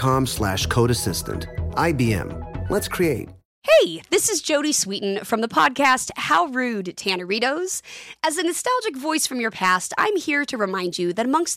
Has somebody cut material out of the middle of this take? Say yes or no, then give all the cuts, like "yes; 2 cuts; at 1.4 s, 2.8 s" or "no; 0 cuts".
no; 0 cuts